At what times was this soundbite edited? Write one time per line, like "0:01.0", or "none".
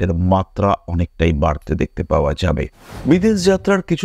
0:02.8